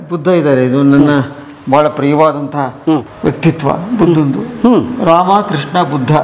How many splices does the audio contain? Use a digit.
0